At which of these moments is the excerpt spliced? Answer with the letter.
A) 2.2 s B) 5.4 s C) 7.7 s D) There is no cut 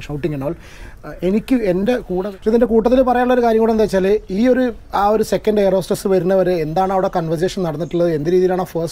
A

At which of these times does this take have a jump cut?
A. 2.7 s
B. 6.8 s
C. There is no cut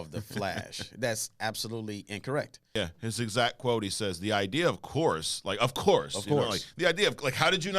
A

